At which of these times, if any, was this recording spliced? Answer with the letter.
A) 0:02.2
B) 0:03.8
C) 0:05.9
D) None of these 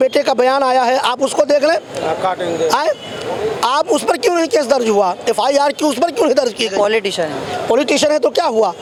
D